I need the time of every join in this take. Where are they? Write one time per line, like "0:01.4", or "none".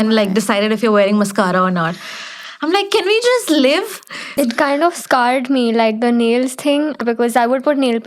0:04.3